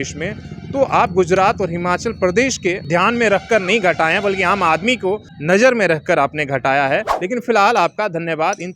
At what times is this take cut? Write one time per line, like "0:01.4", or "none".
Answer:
0:02.8
0:05.3
0:07.1

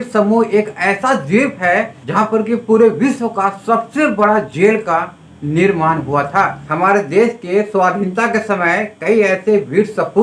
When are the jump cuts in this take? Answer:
0:06.6

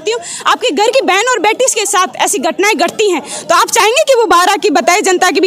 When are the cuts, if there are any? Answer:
none

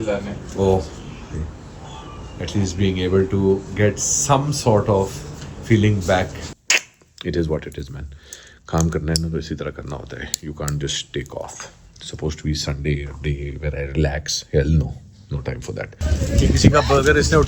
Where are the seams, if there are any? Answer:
0:06.5
0:16.2

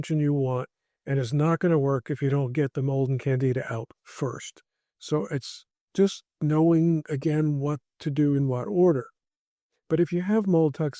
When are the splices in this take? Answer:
none

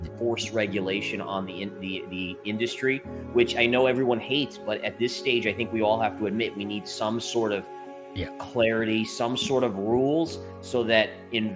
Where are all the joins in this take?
none

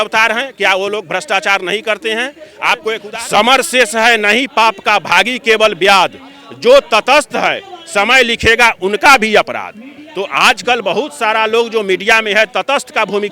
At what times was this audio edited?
0:03.0

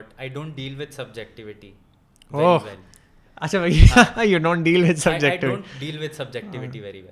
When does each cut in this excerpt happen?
none

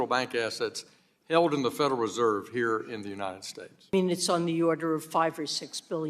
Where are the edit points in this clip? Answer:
0:03.9

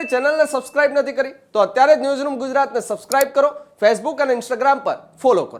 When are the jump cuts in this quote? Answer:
none

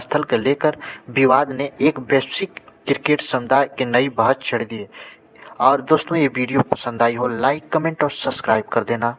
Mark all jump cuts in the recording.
none

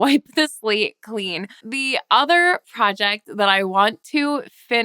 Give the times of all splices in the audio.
0:01.7

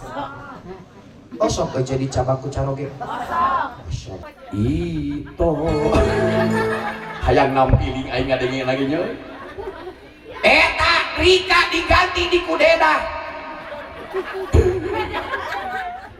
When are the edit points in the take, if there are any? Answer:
0:04.3

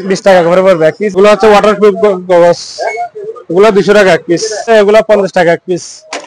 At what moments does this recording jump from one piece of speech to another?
0:01.2
0:04.7

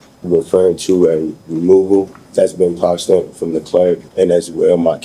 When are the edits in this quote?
0:02.2
0:04.1

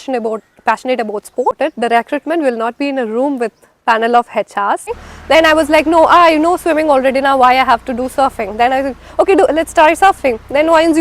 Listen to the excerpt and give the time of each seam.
0:01.6
0:04.9

